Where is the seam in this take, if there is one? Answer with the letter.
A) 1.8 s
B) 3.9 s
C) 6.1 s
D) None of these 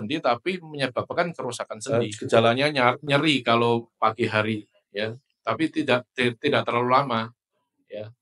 A